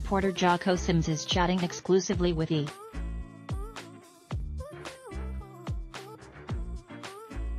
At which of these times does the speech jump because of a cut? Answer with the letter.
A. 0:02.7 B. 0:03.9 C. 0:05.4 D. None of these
D